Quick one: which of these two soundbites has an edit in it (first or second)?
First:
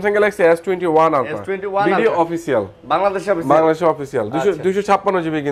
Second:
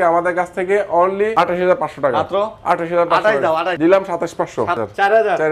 second